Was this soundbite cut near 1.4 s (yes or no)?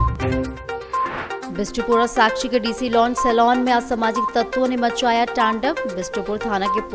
yes